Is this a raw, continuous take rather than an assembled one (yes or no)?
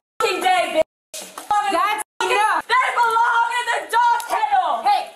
no